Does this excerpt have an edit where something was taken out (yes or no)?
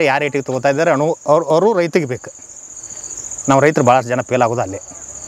no